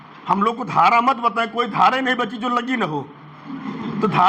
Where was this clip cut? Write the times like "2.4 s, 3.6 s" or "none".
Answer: none